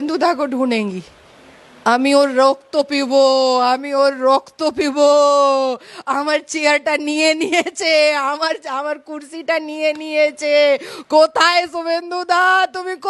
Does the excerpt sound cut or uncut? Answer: uncut